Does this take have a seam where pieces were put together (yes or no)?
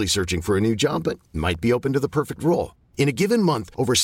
no